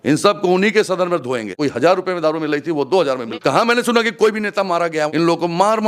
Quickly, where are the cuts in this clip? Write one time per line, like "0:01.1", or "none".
0:01.5
0:03.3
0:05.1